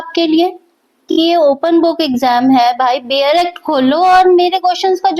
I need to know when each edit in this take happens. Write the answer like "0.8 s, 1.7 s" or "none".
1.1 s